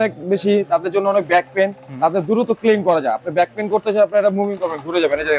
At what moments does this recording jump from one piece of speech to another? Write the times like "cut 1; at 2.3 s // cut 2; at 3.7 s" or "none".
none